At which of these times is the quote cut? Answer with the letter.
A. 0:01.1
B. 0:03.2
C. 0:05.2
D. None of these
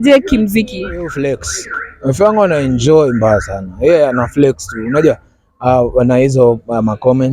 A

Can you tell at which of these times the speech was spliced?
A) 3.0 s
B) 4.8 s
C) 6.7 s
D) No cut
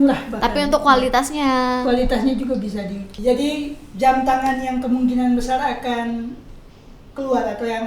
A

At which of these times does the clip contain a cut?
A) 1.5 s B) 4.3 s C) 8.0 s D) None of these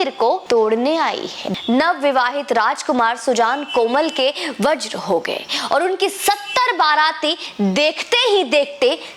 A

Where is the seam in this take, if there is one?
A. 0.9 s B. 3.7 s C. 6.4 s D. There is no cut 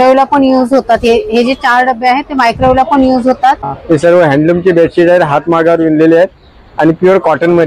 B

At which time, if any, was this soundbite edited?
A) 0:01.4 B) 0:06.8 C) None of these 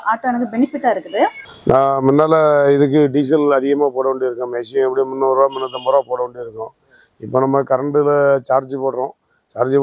A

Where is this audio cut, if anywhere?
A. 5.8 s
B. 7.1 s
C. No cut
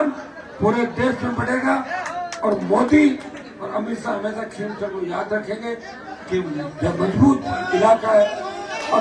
C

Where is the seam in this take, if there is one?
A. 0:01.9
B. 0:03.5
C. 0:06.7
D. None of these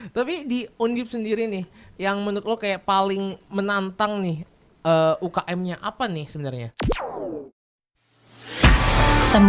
C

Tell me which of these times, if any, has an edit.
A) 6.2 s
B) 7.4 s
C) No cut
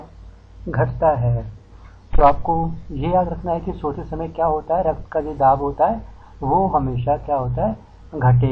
B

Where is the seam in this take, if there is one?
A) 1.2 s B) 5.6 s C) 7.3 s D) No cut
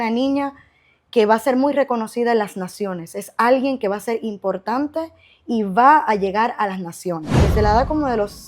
C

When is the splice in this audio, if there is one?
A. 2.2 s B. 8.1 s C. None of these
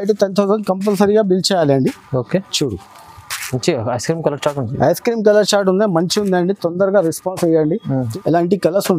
B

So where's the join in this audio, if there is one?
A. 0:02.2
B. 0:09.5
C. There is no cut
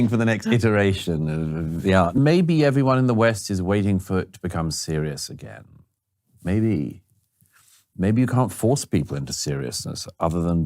A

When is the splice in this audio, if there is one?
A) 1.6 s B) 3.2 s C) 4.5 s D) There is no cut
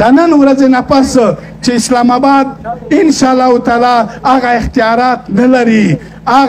D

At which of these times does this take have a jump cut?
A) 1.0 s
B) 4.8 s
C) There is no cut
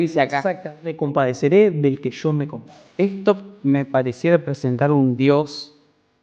A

